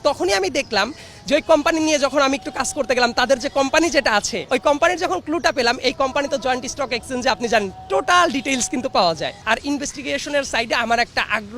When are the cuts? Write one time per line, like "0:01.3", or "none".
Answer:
0:09.4